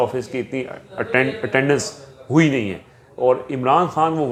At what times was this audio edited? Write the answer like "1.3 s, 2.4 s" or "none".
none